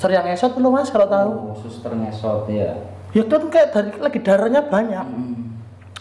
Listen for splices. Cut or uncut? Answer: uncut